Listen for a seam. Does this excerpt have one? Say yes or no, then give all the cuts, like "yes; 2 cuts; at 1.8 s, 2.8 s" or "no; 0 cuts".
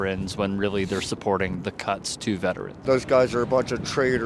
yes; 1 cut; at 2.8 s